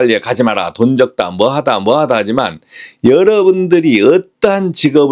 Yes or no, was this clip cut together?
no